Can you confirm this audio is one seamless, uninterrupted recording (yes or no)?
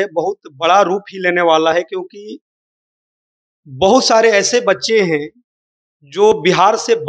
yes